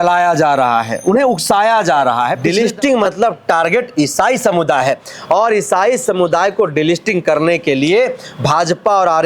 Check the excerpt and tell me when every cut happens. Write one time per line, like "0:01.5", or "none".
0:02.4